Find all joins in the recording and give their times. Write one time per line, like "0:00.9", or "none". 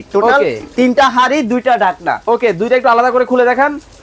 none